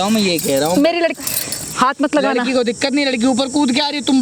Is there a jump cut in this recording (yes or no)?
no